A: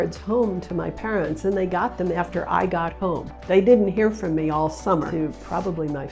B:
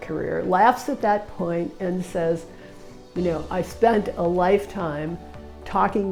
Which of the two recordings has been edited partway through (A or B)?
A